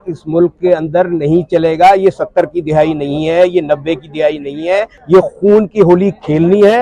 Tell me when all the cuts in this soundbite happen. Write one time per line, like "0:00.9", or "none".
0:05.0